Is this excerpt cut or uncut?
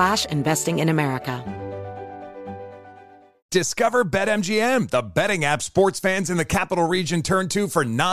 cut